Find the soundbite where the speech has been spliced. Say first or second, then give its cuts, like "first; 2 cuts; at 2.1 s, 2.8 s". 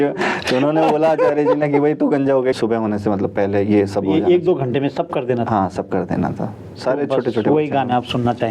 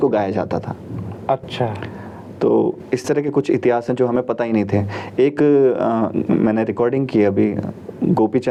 first; 1 cut; at 2.6 s